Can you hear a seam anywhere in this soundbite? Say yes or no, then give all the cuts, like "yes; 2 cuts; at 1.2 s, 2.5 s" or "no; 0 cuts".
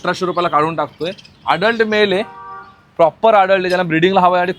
no; 0 cuts